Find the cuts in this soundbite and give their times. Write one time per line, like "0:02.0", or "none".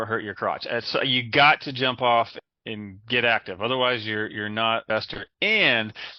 0:02.4
0:04.8